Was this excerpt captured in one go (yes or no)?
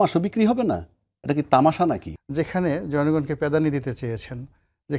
no